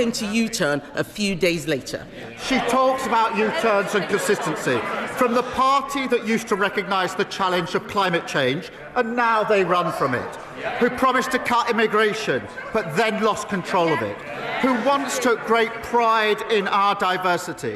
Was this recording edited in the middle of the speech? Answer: yes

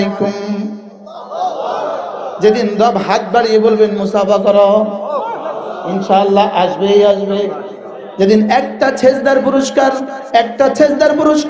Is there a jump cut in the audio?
no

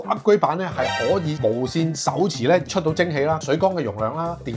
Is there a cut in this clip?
no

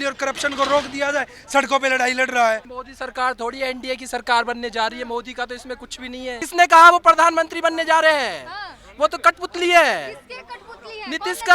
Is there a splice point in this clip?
yes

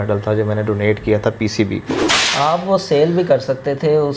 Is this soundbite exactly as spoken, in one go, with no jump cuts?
no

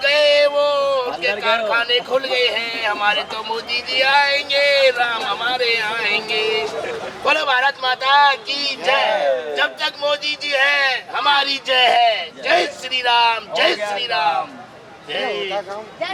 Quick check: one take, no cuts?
yes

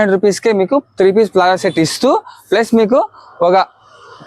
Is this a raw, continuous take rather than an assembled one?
yes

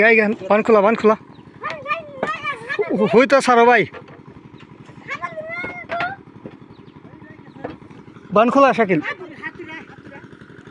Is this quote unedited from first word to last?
yes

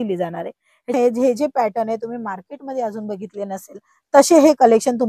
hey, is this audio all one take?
no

